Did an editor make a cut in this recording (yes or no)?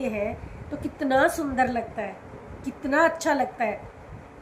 no